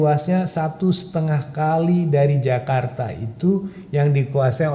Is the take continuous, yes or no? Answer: yes